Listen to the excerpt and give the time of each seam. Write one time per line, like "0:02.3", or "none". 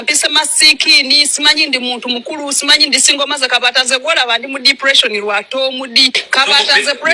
0:06.2